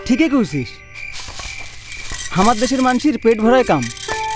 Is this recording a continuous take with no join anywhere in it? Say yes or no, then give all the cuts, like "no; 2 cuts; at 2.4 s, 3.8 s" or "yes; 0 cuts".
yes; 0 cuts